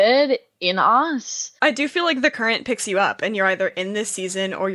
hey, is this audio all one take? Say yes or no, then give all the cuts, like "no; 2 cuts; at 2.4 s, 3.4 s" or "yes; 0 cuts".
no; 1 cut; at 1.4 s